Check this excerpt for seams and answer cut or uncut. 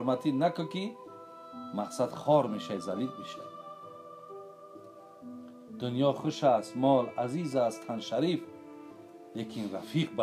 cut